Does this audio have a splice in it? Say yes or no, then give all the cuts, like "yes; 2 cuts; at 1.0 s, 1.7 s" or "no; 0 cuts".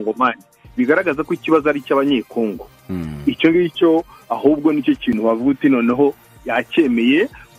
no; 0 cuts